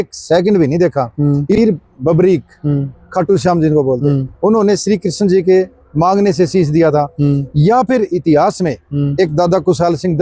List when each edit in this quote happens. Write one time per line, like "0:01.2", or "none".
0:01.6

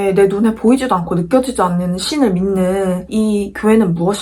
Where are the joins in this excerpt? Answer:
0:03.0

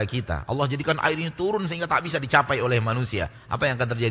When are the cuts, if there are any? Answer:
none

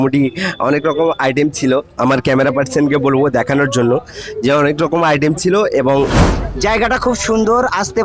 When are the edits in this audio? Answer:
0:06.1

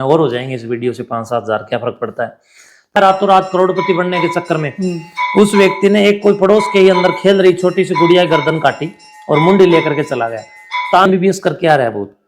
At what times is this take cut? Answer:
0:02.9
0:11.1

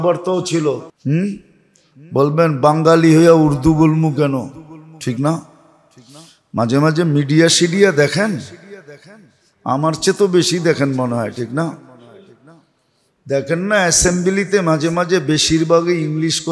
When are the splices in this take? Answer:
0:00.9

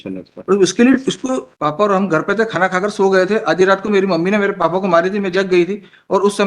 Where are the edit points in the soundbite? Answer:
0:01.5

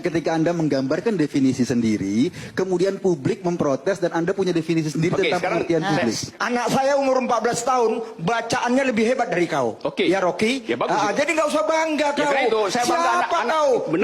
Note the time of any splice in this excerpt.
0:06.3

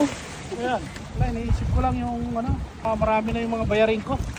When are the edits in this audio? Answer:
0:01.0
0:02.9

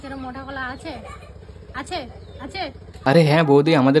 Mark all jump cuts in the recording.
0:03.0

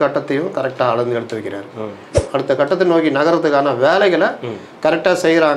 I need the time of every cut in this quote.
0:02.1

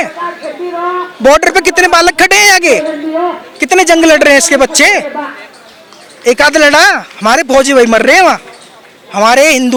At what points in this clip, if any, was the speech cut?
none

